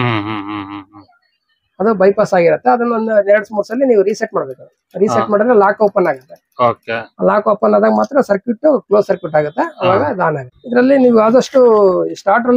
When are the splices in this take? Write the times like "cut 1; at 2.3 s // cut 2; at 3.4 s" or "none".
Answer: cut 1; at 10.5 s